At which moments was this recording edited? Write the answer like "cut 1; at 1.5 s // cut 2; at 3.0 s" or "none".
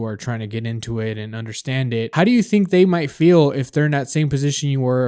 cut 1; at 2.1 s